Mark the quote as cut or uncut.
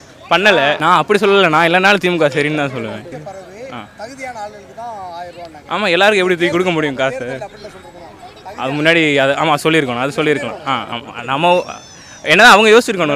cut